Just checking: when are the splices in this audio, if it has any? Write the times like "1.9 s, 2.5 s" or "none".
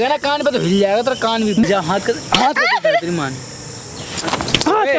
1.6 s

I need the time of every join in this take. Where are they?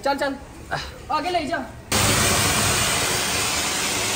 1.9 s

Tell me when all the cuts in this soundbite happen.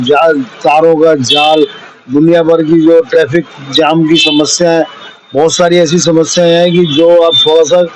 none

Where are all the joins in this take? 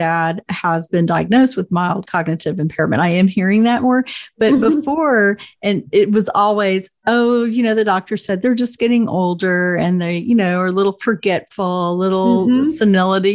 none

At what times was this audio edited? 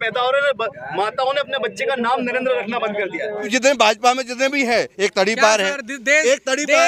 3.5 s

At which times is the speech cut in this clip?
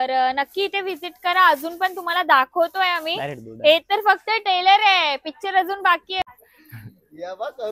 6.3 s

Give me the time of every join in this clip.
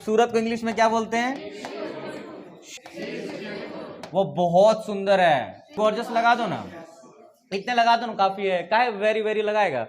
2.7 s, 5.7 s

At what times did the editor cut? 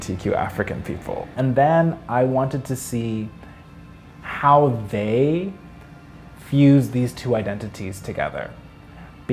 1.4 s

